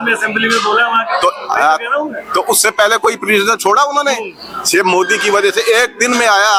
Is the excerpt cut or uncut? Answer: uncut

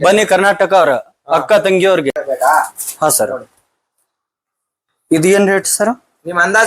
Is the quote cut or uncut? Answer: cut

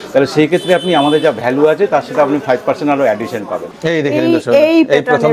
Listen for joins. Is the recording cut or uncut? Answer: cut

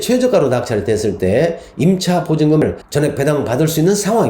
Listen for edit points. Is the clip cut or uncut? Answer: cut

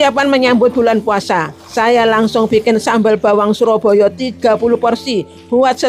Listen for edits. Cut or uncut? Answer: uncut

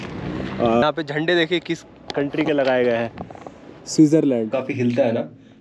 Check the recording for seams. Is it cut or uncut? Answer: cut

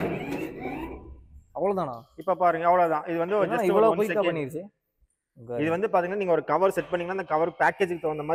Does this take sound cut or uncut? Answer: uncut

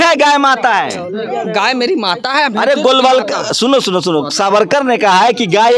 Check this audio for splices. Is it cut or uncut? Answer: uncut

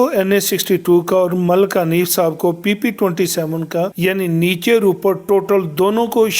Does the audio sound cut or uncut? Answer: uncut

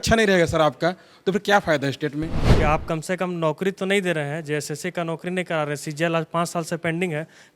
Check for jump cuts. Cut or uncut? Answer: cut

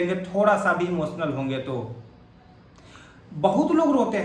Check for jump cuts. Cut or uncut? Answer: uncut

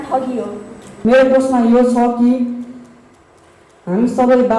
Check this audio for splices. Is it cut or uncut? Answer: cut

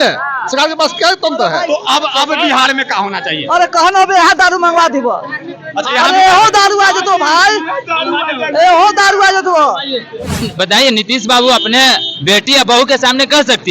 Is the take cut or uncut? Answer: cut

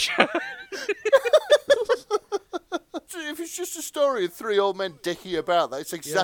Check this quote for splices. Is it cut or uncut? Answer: cut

